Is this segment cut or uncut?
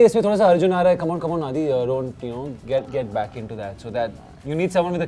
uncut